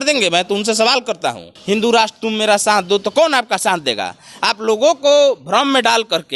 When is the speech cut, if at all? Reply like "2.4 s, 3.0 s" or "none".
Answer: 1.5 s